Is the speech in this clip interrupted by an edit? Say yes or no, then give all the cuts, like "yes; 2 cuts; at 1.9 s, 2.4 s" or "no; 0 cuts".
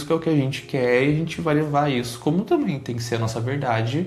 no; 0 cuts